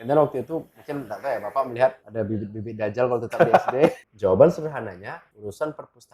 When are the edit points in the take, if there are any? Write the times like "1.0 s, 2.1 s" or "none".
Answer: 4.1 s